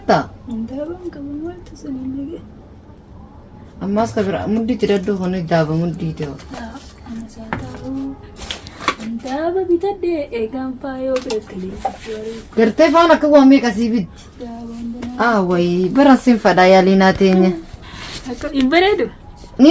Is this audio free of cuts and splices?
yes; 0 cuts

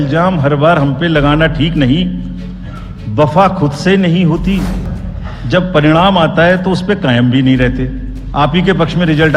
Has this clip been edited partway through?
yes; 1 cut; at 4.8 s

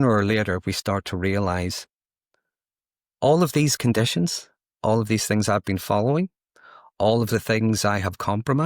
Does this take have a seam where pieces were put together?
no; 0 cuts

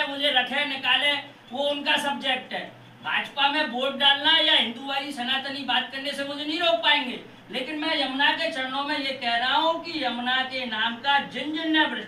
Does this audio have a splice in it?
no; 0 cuts

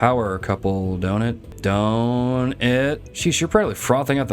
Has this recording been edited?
yes; 2 cuts; at 1.5 s, 3.1 s

